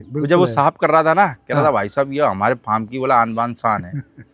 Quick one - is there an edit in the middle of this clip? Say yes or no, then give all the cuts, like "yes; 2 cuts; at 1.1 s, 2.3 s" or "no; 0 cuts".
no; 0 cuts